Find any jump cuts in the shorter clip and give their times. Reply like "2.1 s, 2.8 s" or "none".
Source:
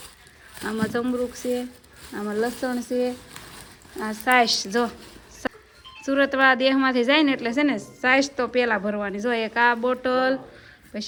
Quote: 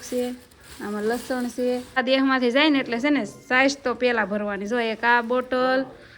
2.0 s